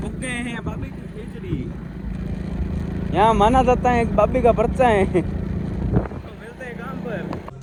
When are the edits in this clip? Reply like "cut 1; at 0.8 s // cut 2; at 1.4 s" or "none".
none